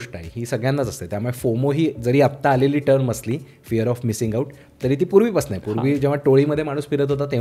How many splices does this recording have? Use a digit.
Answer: 0